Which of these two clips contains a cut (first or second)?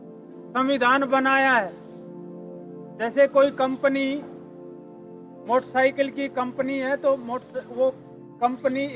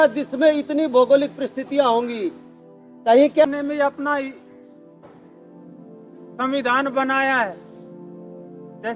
second